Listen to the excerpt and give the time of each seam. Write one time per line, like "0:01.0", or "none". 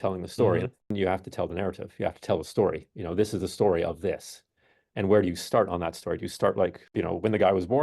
0:00.9
0:06.8